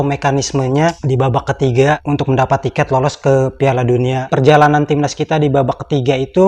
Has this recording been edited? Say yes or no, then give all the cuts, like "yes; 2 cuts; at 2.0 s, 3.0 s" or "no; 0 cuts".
yes; 2 cuts; at 2.0 s, 4.3 s